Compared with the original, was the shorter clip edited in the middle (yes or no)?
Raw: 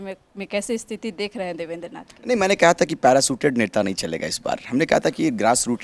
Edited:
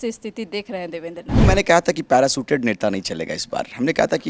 yes